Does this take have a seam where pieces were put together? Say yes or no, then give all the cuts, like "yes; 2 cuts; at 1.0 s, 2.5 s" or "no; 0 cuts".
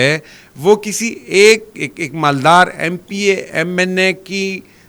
no; 0 cuts